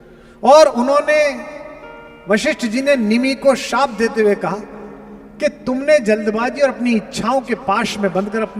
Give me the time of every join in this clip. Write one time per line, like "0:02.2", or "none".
none